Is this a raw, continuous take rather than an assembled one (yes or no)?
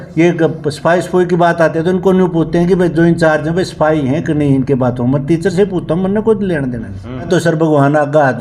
no